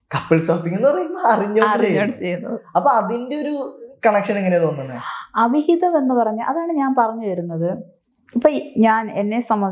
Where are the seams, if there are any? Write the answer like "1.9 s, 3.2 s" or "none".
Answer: none